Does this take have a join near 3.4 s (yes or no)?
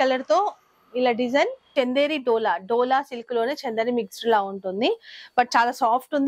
no